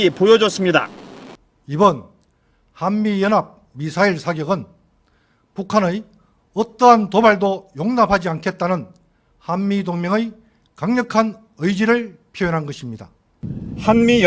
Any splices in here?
yes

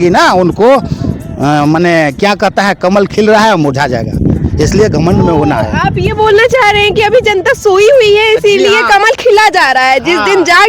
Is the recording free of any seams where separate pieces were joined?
yes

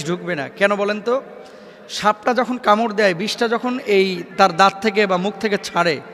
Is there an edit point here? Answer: no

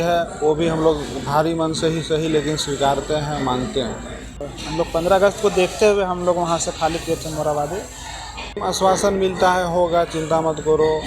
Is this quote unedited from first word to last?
no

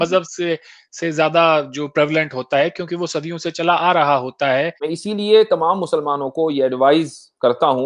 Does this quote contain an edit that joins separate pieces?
yes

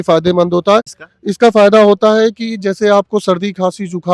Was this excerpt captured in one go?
no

